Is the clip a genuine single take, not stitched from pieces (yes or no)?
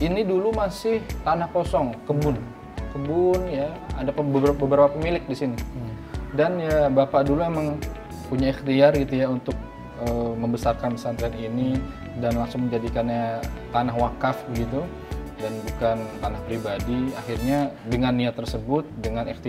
no